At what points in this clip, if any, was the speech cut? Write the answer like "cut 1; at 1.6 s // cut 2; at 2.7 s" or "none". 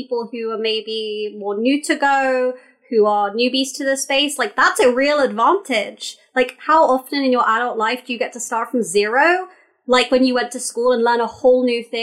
none